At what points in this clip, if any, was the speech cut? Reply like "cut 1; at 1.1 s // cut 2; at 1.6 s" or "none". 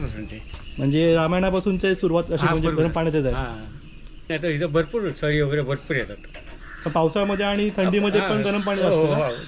cut 1; at 4.3 s